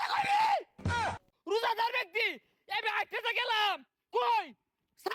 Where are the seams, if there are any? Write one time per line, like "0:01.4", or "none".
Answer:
0:01.1

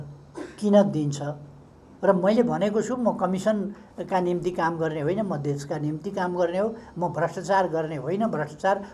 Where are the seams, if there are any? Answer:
none

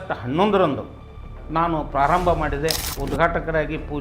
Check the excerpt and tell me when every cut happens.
0:02.9

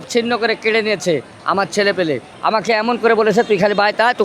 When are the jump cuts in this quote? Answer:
0:02.3

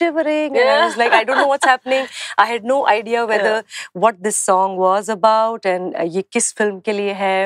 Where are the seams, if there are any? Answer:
none

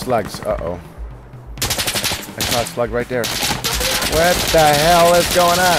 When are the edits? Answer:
none

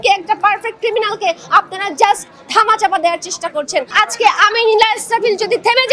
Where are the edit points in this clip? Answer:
0:03.9

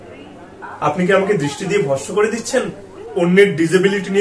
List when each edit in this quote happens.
none

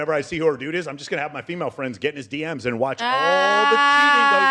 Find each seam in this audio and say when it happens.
none

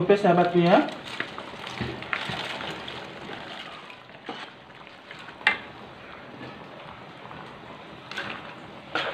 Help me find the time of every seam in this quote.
0:04.0

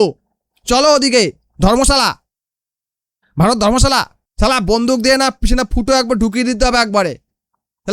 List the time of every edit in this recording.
0:04.2

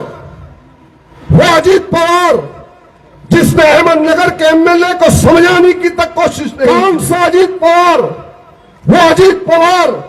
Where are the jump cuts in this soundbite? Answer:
0:06.8

